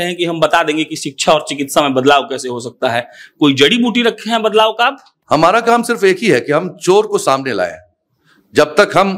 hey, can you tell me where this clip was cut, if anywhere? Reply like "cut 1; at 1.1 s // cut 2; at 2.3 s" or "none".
cut 1; at 5.1 s